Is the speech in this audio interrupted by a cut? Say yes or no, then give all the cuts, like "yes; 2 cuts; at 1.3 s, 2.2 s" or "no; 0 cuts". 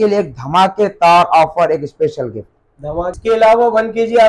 yes; 1 cut; at 3.2 s